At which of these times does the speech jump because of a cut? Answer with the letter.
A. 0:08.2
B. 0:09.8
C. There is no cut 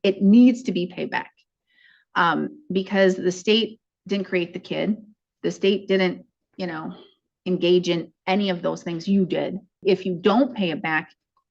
B